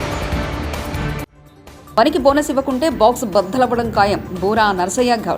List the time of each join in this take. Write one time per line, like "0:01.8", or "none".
0:01.3

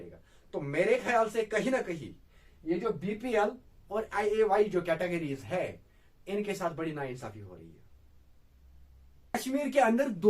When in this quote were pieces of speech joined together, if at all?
0:09.3

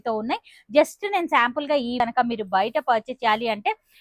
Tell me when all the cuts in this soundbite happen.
0:02.0

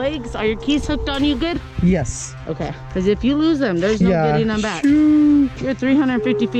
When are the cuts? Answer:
none

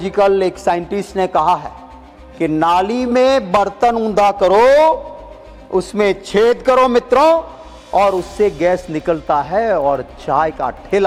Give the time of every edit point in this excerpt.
none

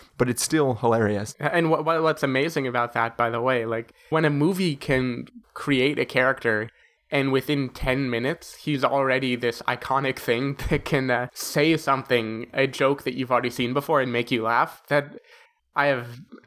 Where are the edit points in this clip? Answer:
0:01.3
0:04.1
0:11.4

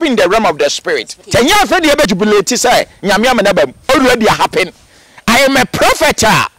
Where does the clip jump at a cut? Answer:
0:01.1
0:02.1
0:03.8

